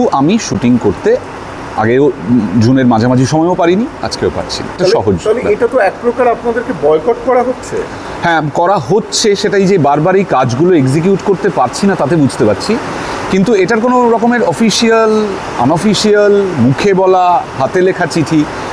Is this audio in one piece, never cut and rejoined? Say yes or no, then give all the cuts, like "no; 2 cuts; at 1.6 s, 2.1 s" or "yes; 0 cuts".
no; 1 cut; at 4.8 s